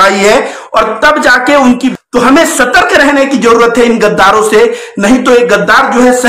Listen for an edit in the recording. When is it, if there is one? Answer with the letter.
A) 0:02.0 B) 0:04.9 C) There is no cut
A